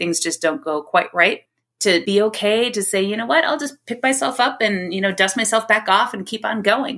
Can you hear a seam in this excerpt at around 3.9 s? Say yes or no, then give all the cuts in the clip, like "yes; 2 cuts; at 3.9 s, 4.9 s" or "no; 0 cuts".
no; 1 cut; at 2.0 s